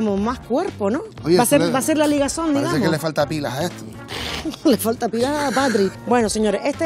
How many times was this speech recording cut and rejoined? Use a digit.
2